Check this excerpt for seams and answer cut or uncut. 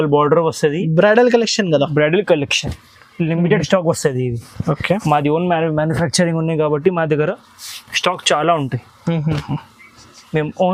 uncut